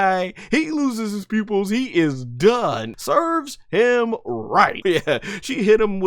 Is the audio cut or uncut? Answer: cut